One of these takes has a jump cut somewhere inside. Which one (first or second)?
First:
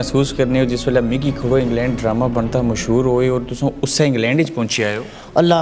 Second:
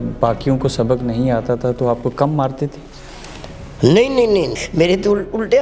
second